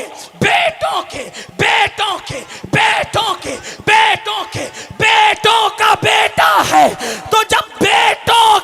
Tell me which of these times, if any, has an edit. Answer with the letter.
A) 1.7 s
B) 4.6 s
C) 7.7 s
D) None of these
D